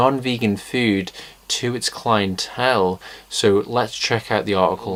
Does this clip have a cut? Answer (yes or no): no